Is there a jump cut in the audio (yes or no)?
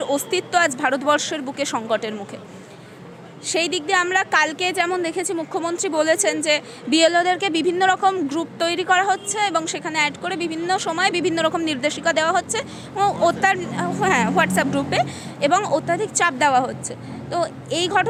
no